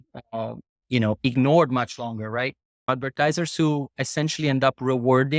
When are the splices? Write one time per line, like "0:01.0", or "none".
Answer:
0:02.9